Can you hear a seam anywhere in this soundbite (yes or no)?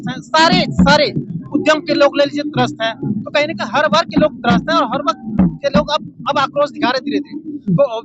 no